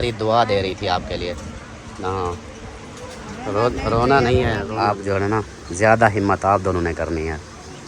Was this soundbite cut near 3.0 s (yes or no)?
no